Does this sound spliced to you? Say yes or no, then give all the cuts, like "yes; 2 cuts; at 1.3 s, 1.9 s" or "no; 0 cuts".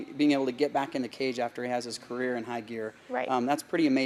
no; 0 cuts